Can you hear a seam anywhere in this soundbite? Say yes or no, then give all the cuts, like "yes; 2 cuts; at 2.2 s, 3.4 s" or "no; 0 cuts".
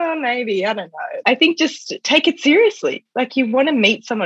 yes; 2 cuts; at 1.0 s, 2.0 s